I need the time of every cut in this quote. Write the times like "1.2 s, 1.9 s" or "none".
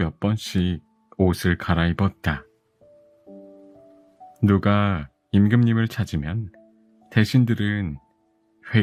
none